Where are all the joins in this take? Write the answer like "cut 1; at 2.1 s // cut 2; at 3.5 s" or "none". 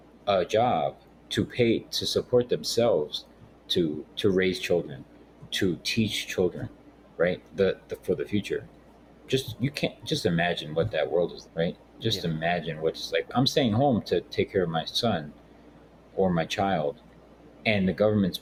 none

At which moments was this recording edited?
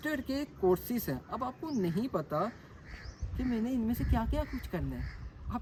none

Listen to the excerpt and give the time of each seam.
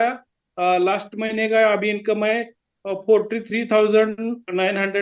none

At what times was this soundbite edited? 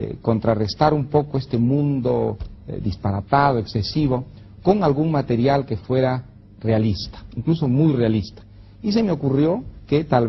cut 1; at 4.1 s

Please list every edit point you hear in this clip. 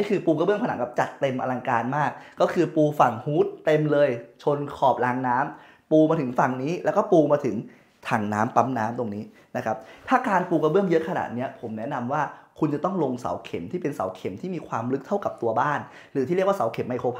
none

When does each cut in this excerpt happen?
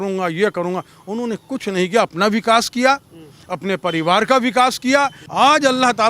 cut 1; at 5.2 s

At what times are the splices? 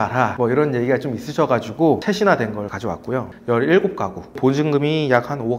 cut 1; at 2.0 s // cut 2; at 3.3 s // cut 3; at 4.3 s

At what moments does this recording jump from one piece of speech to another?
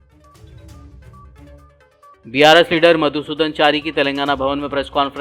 cut 1; at 1.6 s

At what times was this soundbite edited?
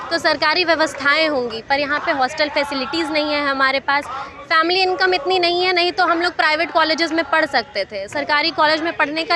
none

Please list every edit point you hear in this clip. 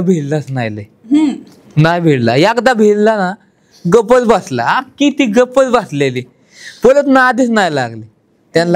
none

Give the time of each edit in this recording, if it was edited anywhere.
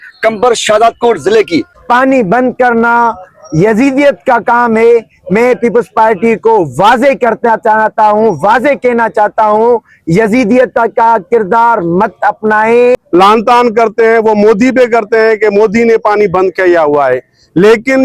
cut 1; at 1.8 s // cut 2; at 13.0 s

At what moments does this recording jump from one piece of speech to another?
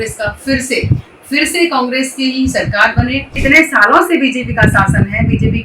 cut 1; at 3.4 s

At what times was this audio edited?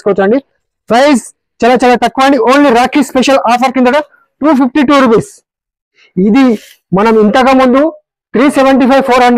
cut 1; at 6.0 s

